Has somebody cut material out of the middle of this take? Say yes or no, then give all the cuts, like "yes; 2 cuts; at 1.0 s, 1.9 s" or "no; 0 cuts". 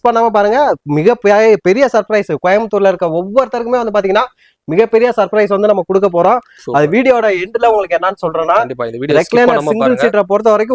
no; 0 cuts